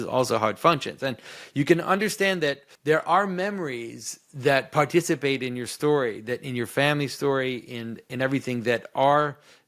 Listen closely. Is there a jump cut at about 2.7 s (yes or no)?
yes